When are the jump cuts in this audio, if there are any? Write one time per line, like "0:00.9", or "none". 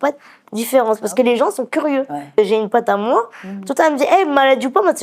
0:02.4